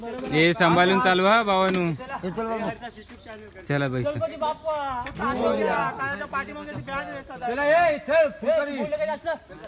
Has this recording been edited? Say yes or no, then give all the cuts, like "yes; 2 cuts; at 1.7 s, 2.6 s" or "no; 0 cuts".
no; 0 cuts